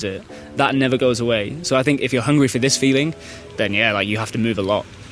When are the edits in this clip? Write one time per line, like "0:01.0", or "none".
0:02.1